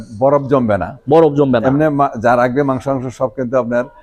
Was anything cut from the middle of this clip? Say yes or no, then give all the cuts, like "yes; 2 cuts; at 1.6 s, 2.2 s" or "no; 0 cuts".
no; 0 cuts